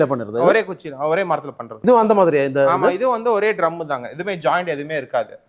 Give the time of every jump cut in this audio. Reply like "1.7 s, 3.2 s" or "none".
1.9 s